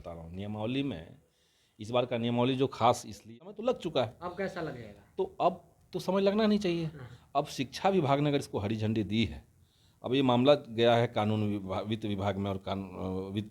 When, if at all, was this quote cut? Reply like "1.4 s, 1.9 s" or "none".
3.2 s